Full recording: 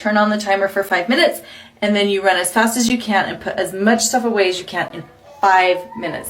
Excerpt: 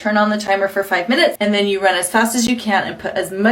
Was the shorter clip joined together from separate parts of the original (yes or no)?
yes